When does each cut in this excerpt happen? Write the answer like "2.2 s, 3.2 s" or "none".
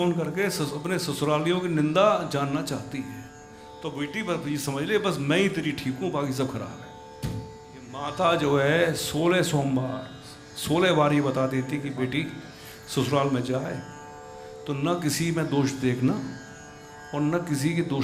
7.8 s, 11.9 s